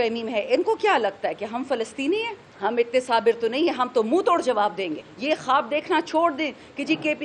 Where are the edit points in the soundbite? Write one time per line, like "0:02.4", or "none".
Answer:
0:02.4
0:05.1

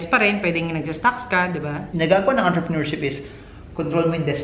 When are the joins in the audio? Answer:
0:01.9

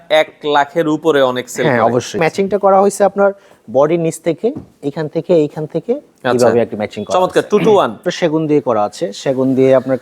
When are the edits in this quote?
0:02.2
0:08.1

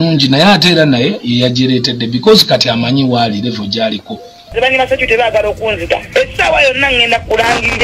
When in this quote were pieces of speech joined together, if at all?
0:04.5

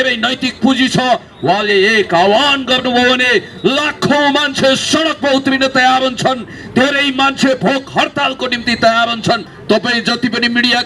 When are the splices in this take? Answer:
0:09.5

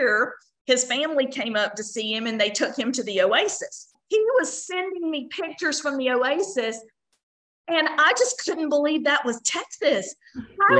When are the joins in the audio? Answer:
0:03.9

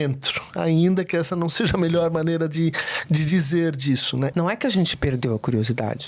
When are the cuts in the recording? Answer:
0:04.3

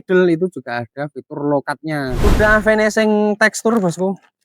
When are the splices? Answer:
0:02.2

